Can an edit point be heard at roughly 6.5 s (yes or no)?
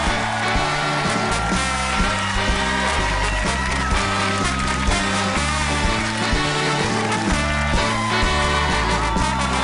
yes